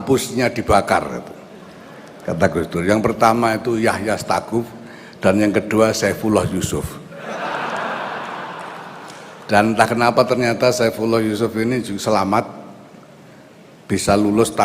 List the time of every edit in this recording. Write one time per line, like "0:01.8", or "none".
0:09.4